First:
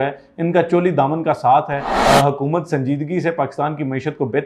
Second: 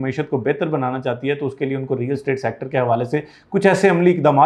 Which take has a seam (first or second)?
first